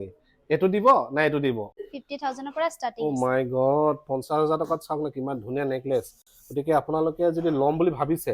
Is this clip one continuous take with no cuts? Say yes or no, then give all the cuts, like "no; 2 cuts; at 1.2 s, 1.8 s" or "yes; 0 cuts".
no; 1 cut; at 1.8 s